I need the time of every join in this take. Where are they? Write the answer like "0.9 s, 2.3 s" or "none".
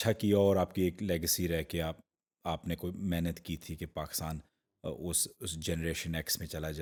none